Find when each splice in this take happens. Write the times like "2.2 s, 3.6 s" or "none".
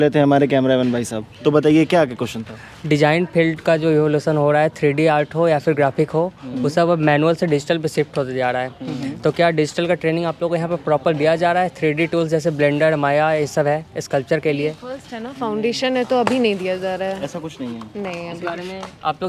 none